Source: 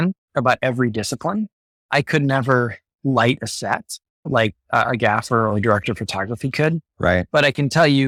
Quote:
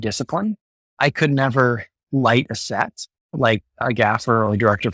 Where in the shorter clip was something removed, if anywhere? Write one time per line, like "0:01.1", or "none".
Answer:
0:03.8